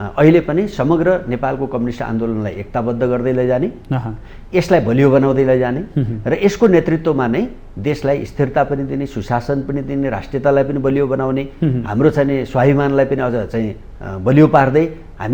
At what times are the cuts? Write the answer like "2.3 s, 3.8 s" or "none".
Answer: none